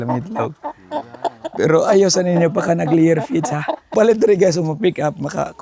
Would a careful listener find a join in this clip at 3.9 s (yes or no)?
yes